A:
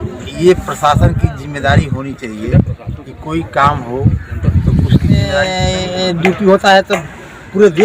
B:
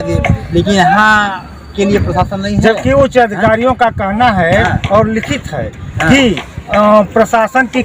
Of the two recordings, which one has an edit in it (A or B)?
A